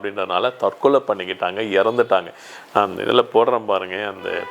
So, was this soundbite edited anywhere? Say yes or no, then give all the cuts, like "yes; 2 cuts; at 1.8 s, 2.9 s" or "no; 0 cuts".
no; 0 cuts